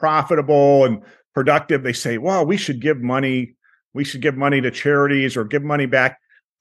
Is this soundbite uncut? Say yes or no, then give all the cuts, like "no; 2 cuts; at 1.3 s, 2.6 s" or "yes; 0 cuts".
yes; 0 cuts